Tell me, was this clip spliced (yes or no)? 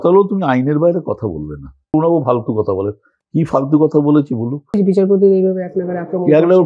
yes